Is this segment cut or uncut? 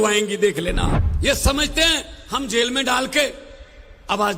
cut